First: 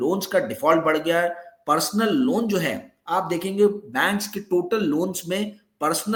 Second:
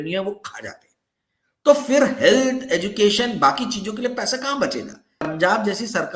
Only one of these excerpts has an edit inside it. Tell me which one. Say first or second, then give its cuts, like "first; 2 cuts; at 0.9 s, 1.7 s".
second; 1 cut; at 5.2 s